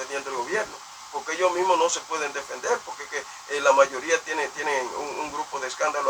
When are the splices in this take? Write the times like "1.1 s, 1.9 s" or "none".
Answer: none